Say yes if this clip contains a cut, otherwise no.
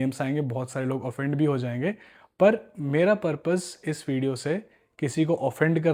no